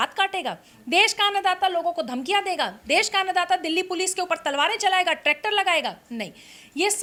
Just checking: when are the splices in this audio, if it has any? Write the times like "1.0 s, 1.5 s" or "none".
none